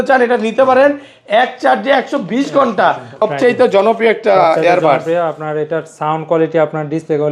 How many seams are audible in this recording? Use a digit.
1